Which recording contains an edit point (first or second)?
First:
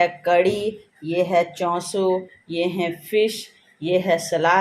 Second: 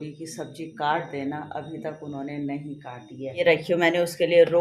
second